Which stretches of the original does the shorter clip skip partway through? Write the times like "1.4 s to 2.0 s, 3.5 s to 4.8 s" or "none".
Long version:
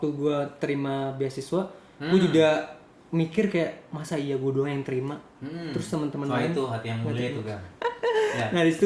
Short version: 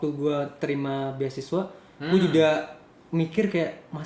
none